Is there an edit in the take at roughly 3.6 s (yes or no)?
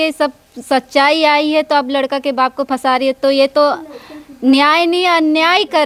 no